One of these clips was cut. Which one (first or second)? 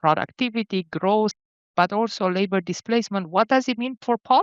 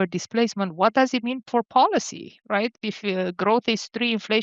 first